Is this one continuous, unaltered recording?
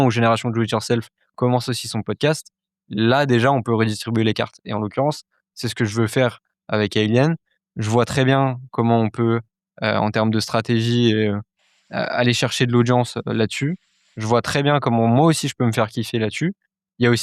yes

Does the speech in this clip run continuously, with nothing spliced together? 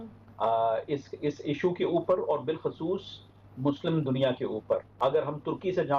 no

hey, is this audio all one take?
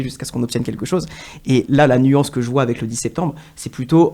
yes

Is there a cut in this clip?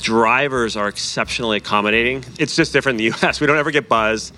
yes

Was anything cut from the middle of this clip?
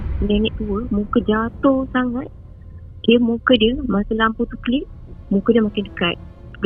no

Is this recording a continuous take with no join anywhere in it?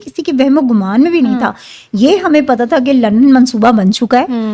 yes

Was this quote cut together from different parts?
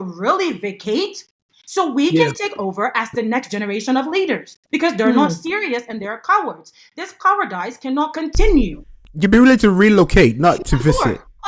yes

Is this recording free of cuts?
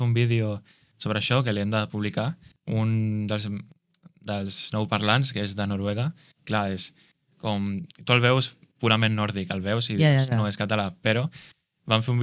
no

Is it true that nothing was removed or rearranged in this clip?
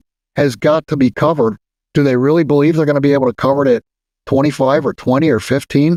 yes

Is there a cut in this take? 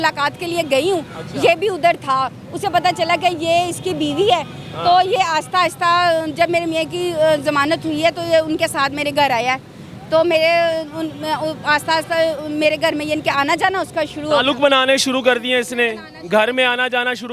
no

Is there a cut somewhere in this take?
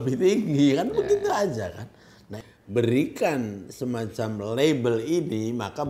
yes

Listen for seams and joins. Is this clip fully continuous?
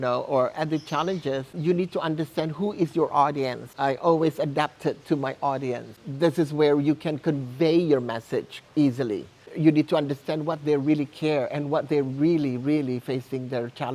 no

